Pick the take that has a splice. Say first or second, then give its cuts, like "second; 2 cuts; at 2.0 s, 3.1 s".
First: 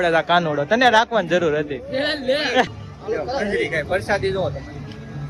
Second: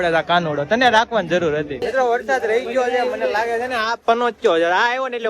second; 1 cut; at 1.8 s